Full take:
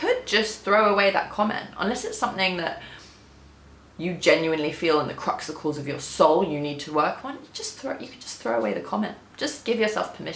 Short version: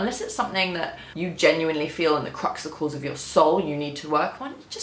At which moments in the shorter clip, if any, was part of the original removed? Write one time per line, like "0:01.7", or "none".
0:01.0